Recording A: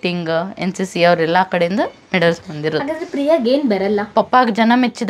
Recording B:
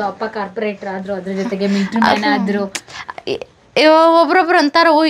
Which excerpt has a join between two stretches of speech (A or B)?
A